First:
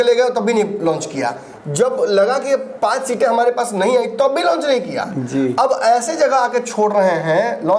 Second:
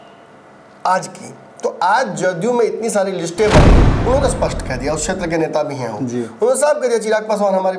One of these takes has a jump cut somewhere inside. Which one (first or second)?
second